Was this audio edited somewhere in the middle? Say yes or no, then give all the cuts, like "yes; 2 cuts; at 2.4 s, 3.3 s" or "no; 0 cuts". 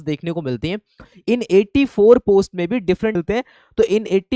yes; 1 cut; at 3.2 s